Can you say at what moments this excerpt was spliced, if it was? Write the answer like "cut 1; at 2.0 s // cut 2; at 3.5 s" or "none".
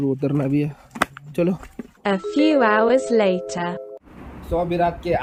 none